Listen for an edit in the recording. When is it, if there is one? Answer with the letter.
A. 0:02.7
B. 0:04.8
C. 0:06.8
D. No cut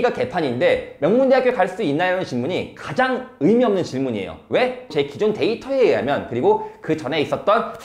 B